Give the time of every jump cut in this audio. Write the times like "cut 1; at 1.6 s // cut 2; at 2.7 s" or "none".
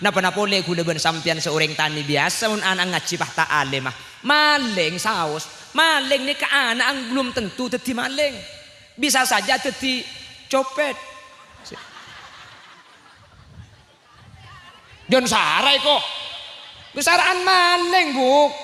none